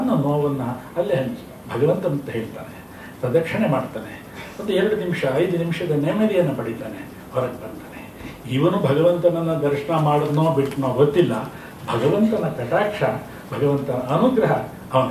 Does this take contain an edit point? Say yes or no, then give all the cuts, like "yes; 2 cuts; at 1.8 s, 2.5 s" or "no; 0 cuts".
no; 0 cuts